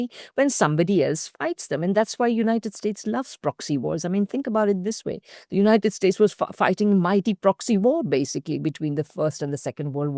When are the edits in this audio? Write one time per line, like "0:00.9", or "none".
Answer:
none